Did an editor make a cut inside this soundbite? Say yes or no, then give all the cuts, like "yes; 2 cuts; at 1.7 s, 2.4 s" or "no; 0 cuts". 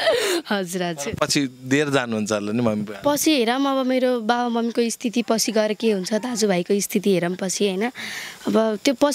no; 0 cuts